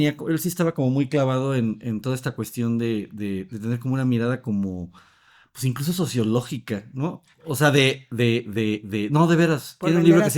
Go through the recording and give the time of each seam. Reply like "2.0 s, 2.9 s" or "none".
none